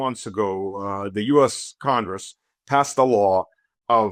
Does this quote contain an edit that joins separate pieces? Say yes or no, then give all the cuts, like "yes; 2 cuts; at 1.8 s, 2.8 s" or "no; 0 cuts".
no; 0 cuts